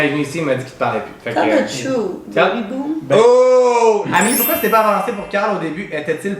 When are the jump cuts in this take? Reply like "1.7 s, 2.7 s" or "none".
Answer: 4.1 s